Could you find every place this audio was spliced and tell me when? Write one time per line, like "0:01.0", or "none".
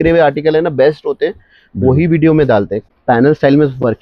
0:02.9